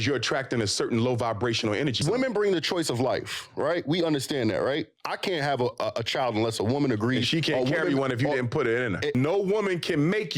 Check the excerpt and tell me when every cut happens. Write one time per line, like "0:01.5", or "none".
0:02.0
0:09.1